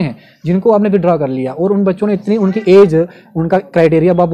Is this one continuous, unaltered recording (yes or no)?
yes